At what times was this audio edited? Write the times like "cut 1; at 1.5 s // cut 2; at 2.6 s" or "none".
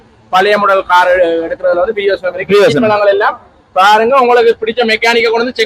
none